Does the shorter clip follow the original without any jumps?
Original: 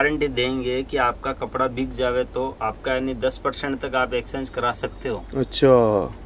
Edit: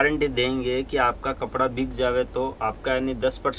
yes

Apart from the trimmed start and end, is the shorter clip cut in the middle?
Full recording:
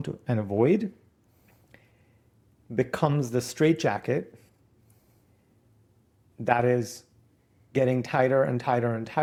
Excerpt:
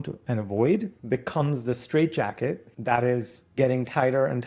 yes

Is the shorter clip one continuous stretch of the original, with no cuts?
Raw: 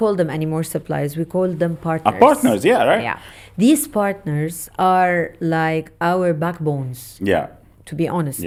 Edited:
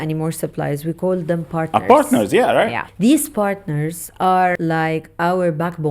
no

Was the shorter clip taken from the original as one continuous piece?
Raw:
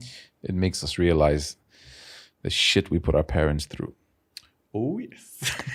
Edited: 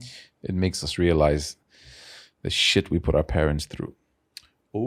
yes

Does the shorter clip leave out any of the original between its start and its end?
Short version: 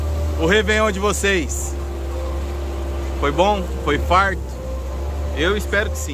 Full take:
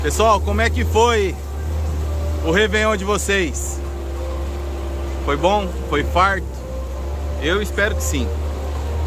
no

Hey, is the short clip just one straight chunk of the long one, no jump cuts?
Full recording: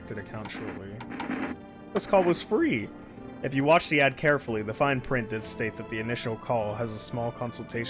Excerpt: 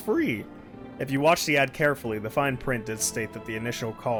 yes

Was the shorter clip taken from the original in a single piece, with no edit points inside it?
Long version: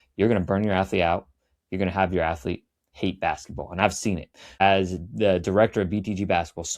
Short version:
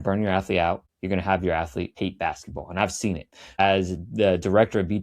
no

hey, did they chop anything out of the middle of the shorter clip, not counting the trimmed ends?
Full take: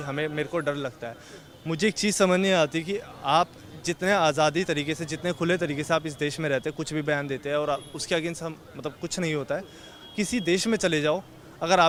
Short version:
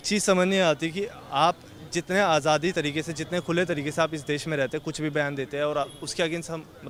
no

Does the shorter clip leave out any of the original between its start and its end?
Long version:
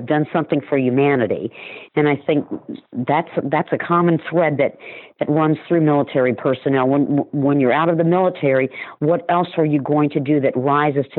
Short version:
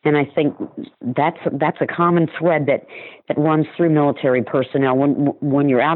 no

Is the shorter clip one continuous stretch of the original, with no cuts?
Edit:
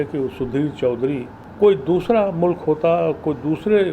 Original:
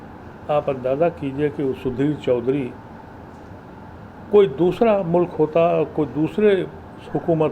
no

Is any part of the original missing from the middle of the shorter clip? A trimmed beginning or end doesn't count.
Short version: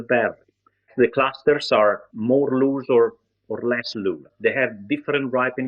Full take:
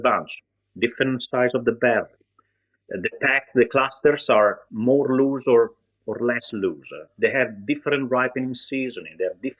yes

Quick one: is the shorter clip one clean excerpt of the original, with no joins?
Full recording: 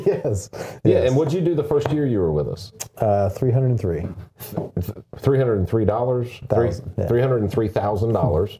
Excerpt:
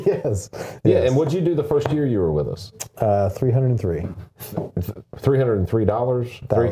yes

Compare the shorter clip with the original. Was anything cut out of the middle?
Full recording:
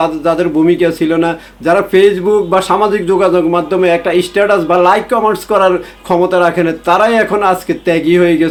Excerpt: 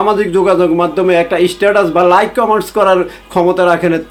no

